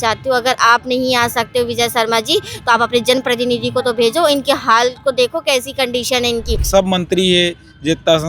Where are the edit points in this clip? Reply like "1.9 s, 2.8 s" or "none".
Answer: 6.6 s